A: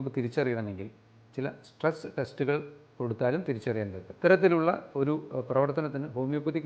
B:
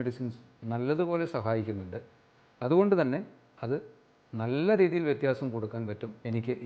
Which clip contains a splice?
A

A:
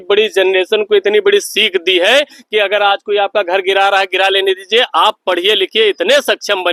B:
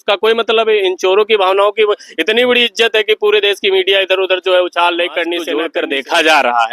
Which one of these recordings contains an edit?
B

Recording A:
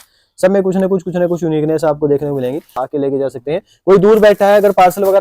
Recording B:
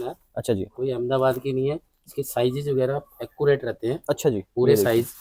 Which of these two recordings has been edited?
A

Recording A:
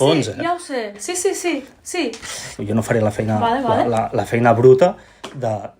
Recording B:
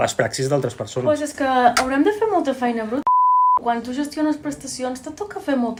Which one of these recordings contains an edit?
A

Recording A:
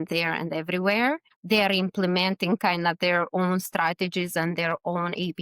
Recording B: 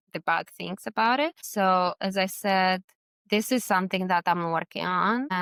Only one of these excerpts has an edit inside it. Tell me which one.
A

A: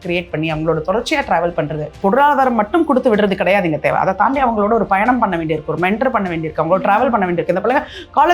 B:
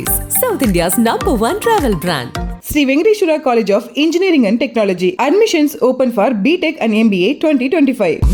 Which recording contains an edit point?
A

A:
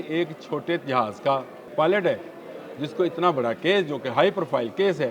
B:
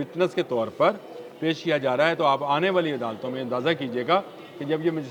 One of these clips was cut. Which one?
A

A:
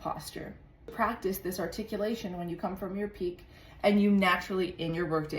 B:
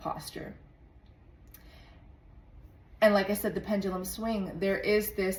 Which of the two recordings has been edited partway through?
A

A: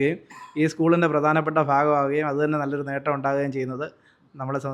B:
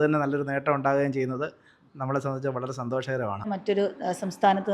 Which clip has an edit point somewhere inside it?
B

